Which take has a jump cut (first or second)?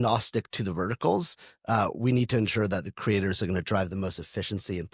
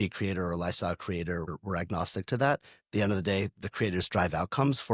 second